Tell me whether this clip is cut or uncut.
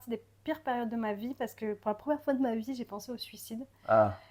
uncut